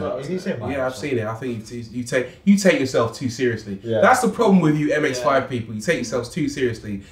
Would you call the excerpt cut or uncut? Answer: uncut